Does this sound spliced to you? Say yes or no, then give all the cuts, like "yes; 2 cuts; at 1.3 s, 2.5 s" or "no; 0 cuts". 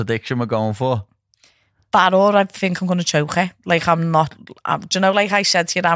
no; 0 cuts